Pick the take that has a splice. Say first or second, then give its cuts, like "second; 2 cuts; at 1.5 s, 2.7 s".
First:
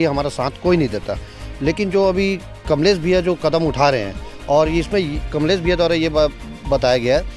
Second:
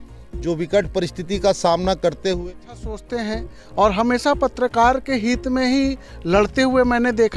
second; 1 cut; at 2.4 s